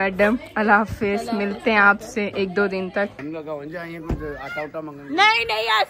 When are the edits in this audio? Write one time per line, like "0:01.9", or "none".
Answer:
0:03.2